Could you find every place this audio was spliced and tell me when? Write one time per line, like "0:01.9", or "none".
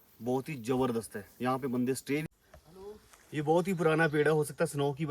0:02.2